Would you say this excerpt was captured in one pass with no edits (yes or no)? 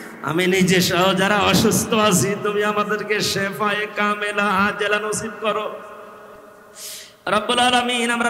no